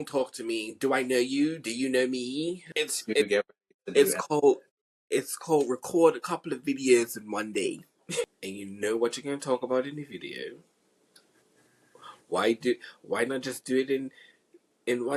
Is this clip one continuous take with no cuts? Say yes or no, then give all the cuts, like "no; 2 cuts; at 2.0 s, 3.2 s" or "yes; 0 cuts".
no; 2 cuts; at 2.6 s, 8.3 s